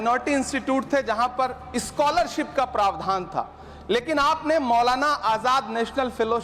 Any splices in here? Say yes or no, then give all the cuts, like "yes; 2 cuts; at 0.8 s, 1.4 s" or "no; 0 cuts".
no; 0 cuts